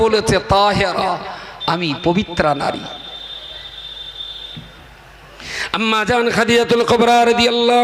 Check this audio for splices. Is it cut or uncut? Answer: uncut